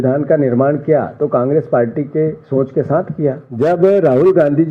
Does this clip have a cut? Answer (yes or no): yes